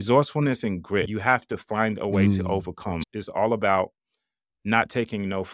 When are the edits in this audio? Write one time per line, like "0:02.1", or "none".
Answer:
0:03.0